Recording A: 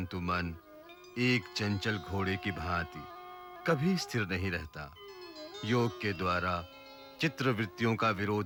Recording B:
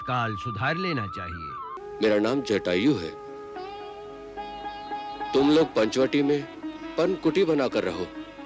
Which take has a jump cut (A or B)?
B